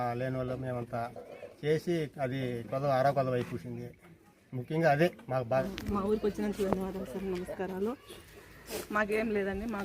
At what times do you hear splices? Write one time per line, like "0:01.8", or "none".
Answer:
0:05.6